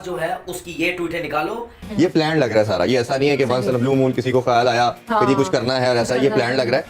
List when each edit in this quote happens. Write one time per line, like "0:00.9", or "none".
0:01.9